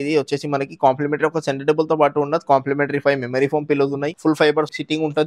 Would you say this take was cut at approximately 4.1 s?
yes; 1 cut; at 4.1 s

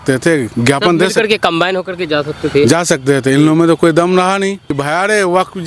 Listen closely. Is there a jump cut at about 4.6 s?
yes; 1 cut; at 4.6 s

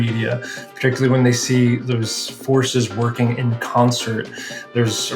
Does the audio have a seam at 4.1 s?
no; 1 cut; at 1.8 s

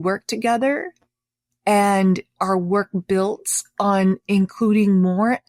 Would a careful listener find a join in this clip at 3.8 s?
no; 1 cut; at 2.4 s

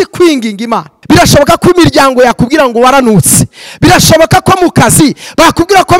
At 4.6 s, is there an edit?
no; 1 cut; at 0.9 s

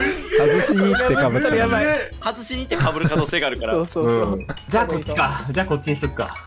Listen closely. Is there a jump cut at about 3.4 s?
no; 2 cuts; at 2.2 s, 4.7 s

